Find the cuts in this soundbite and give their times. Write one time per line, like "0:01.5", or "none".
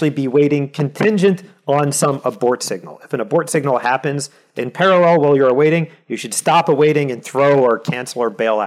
none